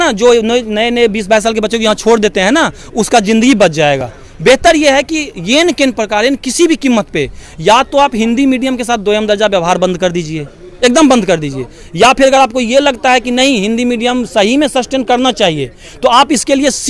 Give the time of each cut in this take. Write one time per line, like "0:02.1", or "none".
none